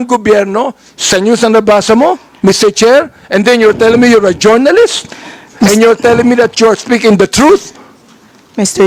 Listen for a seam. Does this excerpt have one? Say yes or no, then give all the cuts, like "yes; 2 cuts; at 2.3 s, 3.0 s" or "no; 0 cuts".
no; 0 cuts